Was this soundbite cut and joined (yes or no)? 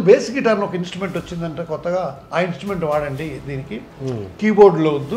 no